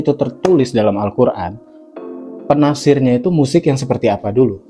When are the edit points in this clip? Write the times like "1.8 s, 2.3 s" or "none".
none